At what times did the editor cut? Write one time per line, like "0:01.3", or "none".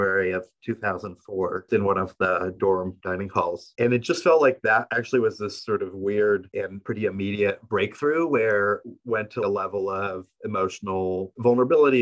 0:01.7
0:09.4